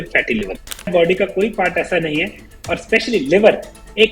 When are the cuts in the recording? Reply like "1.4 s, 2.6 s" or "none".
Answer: 0.9 s